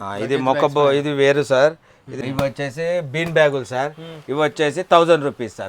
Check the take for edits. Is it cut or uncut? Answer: cut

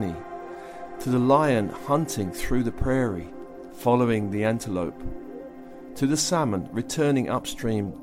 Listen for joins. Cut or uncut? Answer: uncut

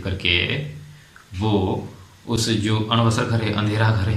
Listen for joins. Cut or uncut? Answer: uncut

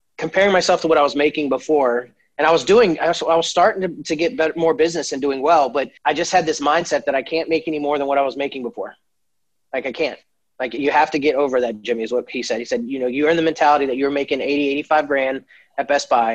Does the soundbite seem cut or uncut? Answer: cut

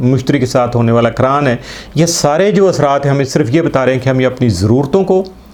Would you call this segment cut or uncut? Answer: uncut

